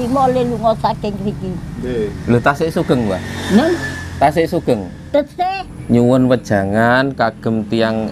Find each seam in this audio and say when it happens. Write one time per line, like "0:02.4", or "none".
0:05.4